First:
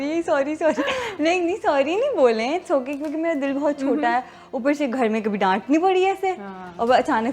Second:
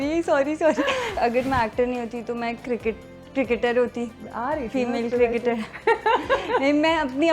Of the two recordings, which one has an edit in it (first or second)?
second